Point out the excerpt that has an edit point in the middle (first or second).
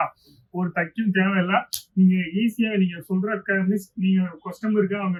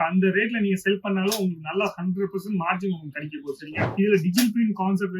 second